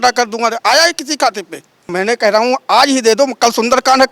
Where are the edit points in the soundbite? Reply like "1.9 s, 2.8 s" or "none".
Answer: 1.8 s